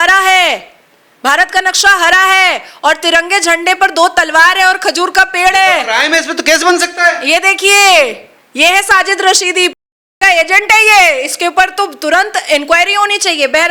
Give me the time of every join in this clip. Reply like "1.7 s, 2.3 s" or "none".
none